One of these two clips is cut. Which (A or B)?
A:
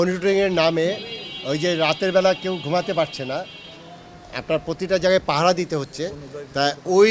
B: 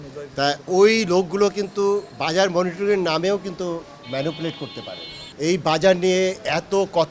B